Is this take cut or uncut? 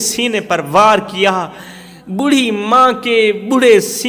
uncut